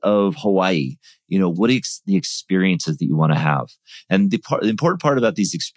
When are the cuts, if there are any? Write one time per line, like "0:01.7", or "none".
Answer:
0:01.5